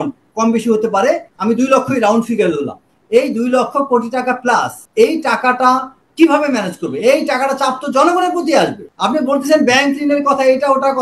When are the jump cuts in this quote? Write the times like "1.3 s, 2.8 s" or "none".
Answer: 1.3 s, 4.8 s, 8.9 s